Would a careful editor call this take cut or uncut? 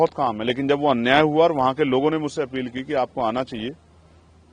uncut